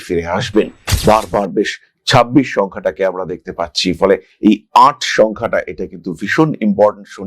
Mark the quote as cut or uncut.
uncut